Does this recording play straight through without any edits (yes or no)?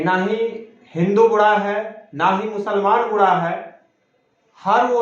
yes